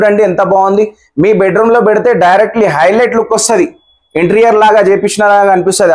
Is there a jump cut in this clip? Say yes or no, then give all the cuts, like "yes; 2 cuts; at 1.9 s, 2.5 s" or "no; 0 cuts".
no; 0 cuts